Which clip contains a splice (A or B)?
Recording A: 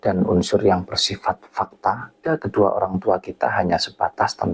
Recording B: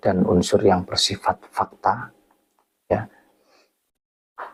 A